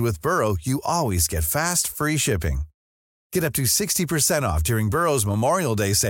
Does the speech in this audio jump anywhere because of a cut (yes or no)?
no